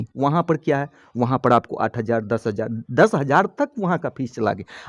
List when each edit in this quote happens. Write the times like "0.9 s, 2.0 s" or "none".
none